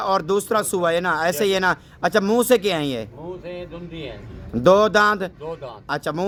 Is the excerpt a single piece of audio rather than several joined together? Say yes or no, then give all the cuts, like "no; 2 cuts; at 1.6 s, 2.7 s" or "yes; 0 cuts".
yes; 0 cuts